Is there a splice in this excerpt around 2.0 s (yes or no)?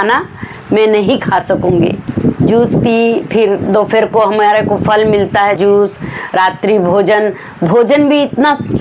yes